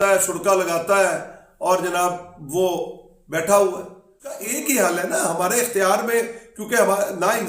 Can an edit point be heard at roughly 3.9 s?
yes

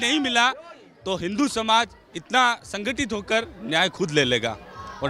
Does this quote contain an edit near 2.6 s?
no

